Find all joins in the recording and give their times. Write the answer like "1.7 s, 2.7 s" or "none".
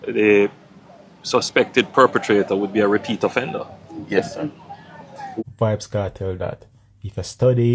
5.4 s